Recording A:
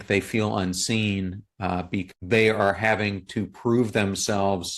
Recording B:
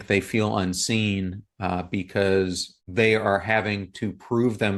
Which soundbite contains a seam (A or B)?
A